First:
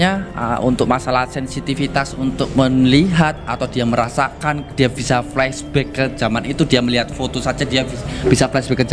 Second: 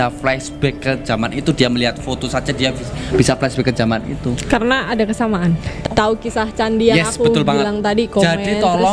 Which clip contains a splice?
second; 1 cut; at 5.7 s

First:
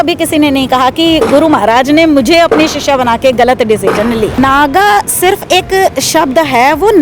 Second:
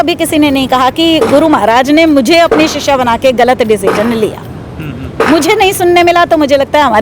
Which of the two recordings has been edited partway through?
first; 1 cut; at 4.4 s

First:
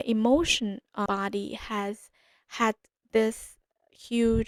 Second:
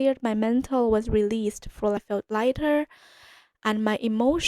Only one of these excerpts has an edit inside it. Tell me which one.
second; 1 cut; at 2.0 s

